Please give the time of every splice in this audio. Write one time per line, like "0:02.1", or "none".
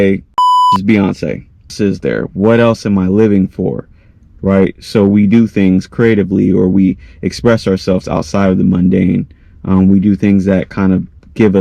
0:01.7